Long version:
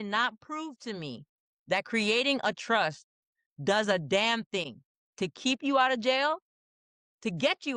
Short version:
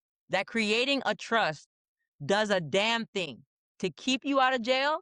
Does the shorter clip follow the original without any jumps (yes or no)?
yes